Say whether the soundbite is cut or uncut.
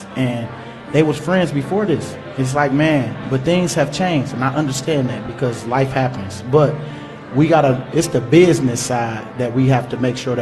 uncut